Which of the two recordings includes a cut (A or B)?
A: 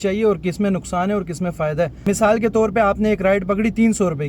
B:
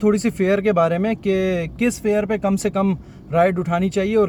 A